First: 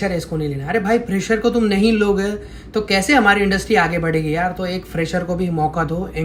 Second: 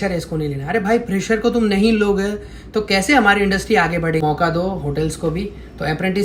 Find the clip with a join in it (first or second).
second